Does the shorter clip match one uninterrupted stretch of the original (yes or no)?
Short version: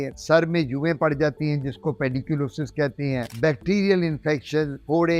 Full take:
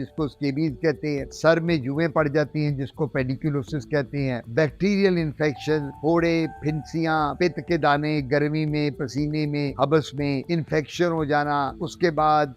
yes